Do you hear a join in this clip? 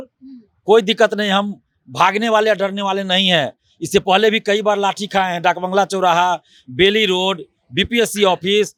no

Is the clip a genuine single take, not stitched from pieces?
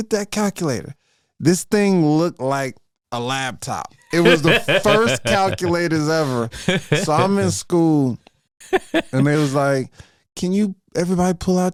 yes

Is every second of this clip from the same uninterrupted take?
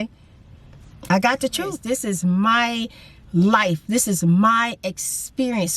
no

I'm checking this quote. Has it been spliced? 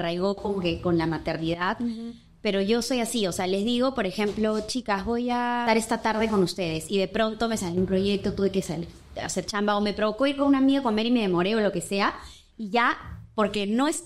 yes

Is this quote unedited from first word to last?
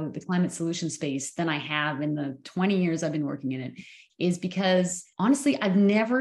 no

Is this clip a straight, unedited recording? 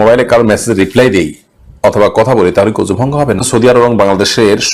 no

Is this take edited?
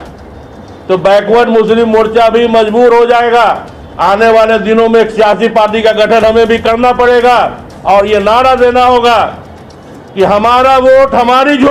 no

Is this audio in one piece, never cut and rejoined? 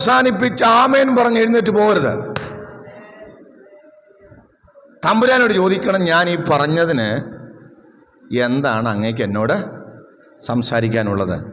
yes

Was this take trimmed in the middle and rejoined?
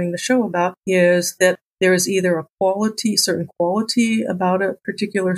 no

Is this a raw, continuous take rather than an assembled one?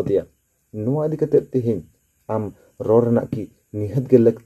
yes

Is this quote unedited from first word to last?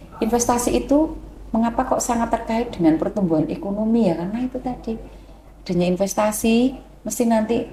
yes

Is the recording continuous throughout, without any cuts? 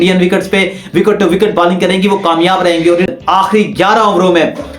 no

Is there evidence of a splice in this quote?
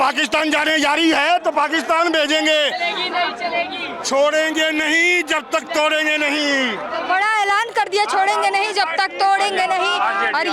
no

